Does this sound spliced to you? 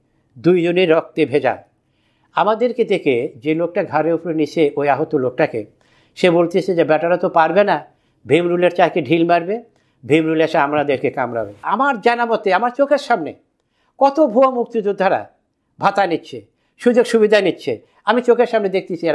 yes; 1 cut; at 11.6 s

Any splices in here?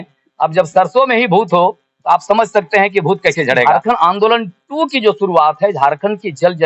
yes; 1 cut; at 3.6 s

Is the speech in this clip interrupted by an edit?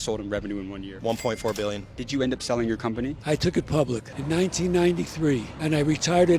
yes; 2 cuts; at 0.9 s, 1.9 s

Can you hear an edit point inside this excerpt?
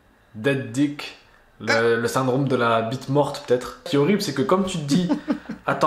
yes; 1 cut; at 3.9 s

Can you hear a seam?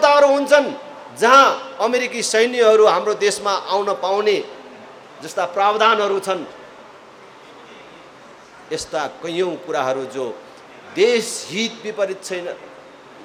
no; 0 cuts

